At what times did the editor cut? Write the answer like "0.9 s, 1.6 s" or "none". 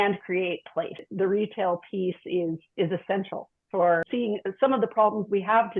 1.1 s, 4.0 s